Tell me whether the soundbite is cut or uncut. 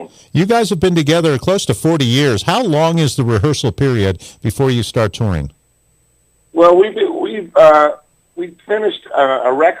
cut